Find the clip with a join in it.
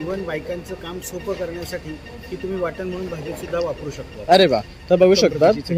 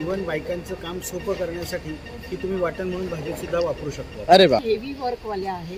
second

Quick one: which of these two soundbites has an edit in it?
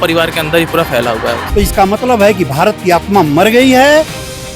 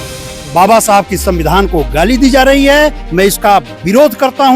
first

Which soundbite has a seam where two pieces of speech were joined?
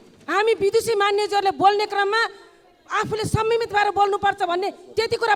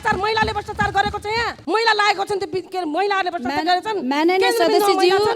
second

